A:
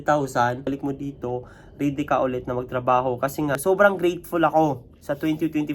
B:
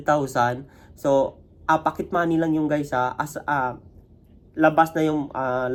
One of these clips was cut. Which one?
A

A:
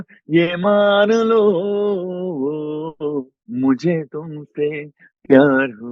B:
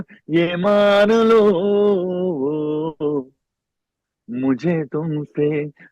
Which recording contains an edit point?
A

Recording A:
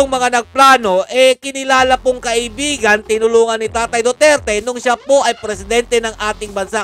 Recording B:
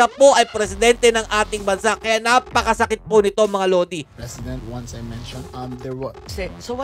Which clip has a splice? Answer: B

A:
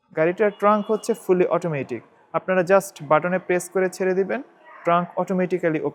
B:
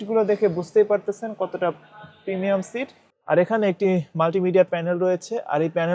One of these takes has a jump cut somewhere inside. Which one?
B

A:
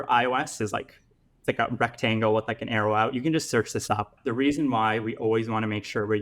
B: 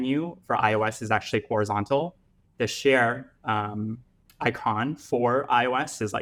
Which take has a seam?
A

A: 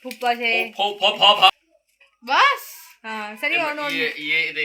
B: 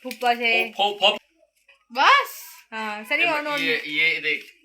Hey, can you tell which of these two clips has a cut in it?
B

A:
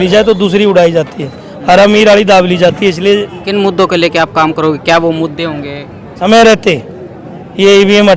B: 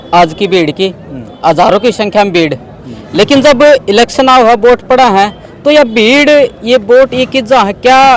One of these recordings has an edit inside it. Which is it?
A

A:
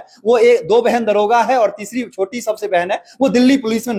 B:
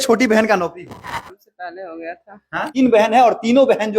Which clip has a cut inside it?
B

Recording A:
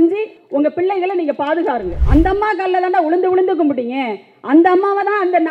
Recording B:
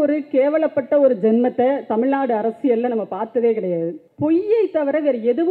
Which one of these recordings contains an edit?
A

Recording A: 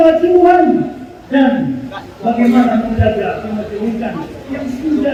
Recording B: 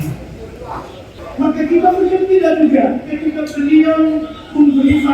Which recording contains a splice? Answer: B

